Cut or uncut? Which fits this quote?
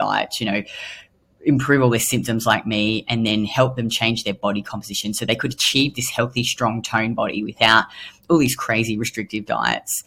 uncut